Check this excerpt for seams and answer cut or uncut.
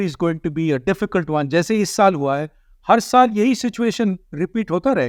uncut